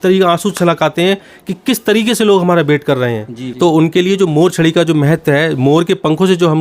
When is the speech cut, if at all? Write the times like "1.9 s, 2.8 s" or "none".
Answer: 3.4 s